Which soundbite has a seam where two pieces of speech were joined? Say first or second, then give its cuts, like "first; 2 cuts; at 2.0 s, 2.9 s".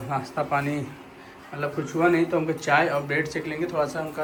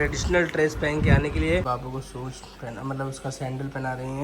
second; 1 cut; at 1.6 s